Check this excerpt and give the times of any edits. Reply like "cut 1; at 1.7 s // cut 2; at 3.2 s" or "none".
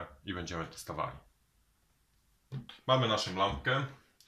cut 1; at 2.7 s